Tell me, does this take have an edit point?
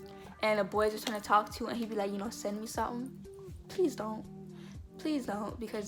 no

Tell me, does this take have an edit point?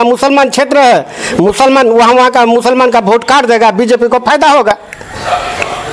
no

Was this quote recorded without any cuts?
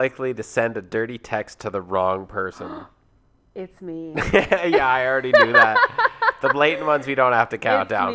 yes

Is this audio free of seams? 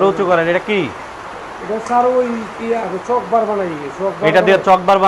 yes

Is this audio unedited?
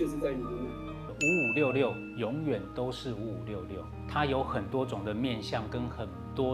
yes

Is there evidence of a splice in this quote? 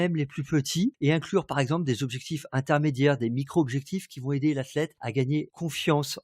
yes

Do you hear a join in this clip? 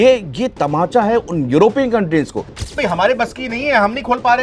yes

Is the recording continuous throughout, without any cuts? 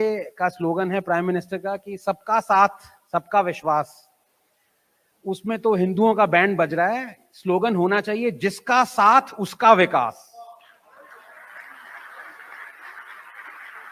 yes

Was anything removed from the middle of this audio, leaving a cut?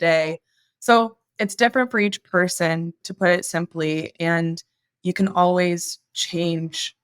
yes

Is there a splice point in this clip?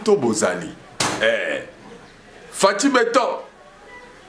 no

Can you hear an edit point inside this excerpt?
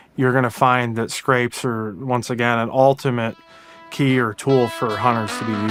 no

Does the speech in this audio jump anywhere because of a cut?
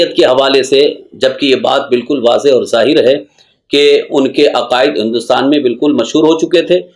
no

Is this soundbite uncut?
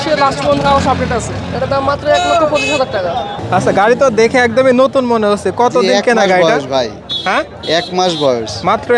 no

